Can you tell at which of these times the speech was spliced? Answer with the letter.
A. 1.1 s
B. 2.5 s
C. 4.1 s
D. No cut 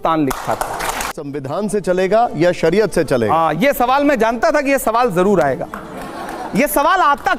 A